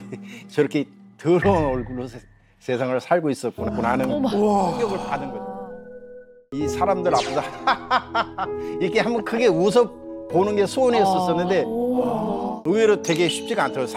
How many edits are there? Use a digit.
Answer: 2